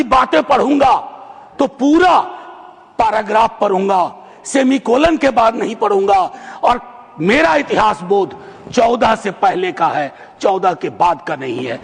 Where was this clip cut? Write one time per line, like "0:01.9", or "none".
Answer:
none